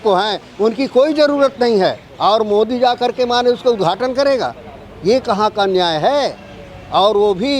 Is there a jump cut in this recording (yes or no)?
no